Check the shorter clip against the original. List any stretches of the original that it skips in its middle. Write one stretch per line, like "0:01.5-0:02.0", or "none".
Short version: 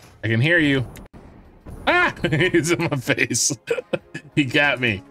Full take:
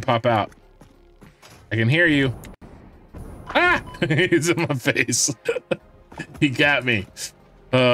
0:03.5-0:03.8
0:05.9-0:06.2